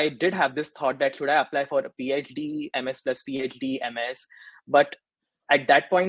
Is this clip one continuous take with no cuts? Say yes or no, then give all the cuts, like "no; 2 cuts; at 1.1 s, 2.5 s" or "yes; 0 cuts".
yes; 0 cuts